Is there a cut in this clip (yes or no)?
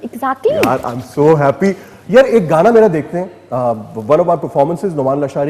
no